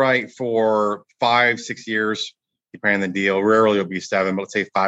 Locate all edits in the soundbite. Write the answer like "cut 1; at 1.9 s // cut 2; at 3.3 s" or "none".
none